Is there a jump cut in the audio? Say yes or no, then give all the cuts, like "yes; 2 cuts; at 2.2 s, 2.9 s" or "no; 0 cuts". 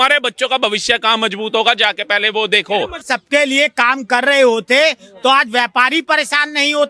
yes; 1 cut; at 3.0 s